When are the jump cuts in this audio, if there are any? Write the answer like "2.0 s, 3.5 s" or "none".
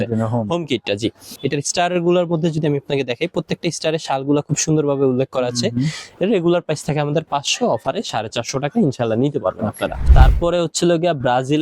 1.3 s, 6.0 s, 10.0 s